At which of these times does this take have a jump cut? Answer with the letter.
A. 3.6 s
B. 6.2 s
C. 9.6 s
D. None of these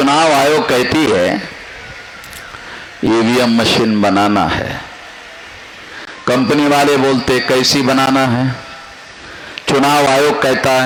D